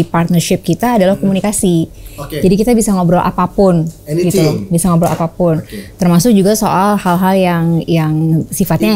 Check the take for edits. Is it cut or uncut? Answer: uncut